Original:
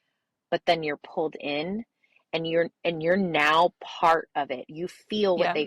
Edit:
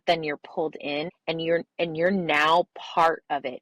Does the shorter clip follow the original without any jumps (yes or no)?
no